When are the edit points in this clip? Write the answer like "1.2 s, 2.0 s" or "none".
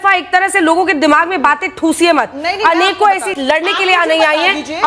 3.3 s